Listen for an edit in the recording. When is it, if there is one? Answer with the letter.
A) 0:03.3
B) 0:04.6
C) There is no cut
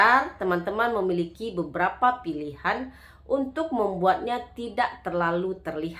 C